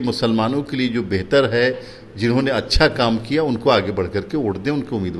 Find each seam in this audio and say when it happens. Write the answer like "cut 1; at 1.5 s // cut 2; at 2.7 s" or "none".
none